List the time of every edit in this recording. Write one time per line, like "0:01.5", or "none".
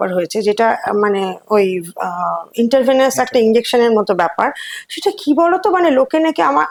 none